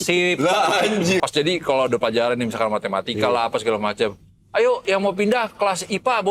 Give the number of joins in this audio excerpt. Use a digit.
1